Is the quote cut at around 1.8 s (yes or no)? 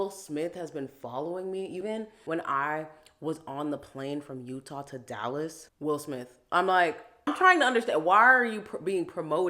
yes